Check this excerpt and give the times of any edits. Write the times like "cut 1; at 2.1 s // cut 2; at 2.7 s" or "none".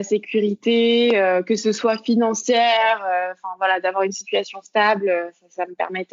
none